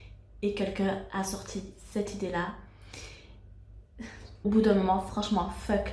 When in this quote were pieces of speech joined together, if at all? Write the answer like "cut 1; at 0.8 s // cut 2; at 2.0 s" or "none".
cut 1; at 4.4 s